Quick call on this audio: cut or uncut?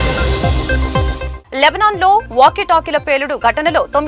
uncut